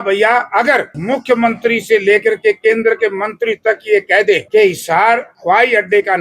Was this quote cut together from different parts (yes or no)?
yes